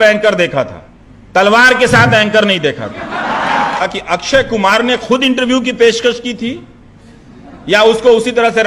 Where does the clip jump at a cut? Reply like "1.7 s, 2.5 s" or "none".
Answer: 3.8 s